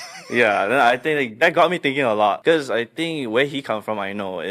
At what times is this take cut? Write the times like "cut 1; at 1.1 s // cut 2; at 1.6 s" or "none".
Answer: cut 1; at 2.4 s